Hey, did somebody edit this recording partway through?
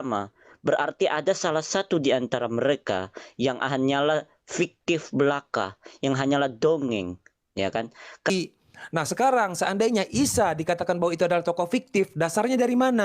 yes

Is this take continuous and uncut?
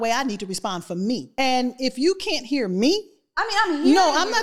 no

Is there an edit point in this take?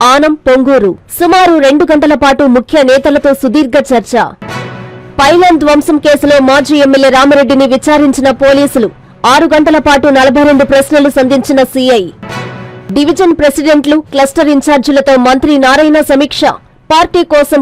no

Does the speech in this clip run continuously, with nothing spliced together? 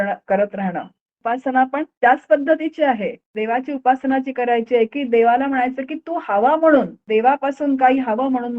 no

